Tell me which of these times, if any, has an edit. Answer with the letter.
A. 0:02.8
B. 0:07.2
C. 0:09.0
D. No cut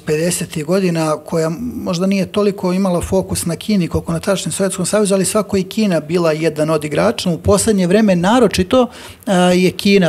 B